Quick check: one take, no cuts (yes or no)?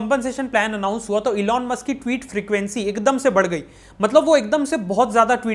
yes